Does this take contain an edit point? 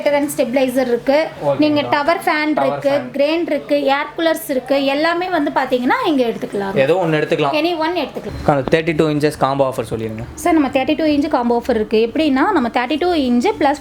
yes; 1 cut; at 8.2 s

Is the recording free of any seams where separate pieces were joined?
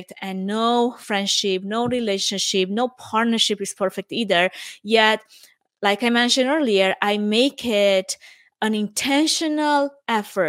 yes; 0 cuts

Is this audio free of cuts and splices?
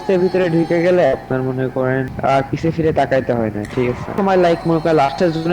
no; 1 cut; at 4.1 s

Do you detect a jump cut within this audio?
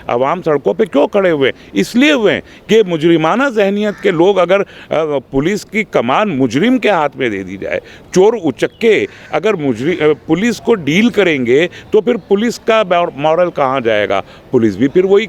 no; 0 cuts

